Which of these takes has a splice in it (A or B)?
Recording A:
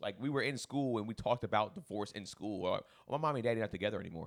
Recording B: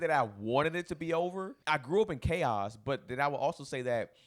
B